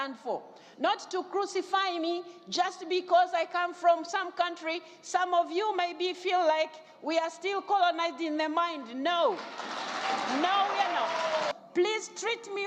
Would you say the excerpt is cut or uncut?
cut